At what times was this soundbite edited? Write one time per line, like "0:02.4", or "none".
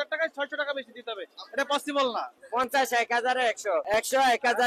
0:02.4